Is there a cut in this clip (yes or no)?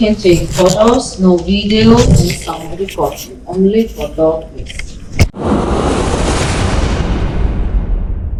no